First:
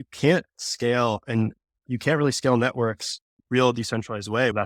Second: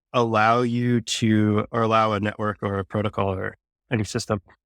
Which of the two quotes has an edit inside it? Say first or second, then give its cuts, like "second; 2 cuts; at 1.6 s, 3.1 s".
second; 1 cut; at 1.7 s